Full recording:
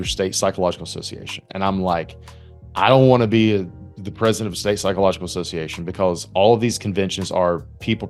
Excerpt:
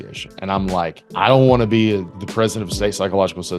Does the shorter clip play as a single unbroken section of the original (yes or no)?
no